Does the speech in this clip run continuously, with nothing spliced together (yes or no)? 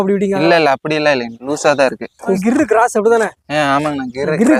yes